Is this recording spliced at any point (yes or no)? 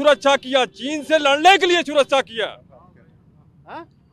no